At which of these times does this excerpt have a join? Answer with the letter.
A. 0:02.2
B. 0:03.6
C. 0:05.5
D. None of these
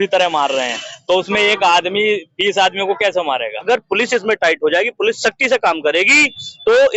B